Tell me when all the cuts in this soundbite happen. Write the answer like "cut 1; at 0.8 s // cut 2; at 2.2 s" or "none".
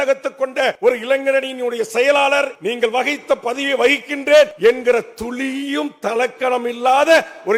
cut 1; at 0.8 s // cut 2; at 2.6 s // cut 3; at 4.5 s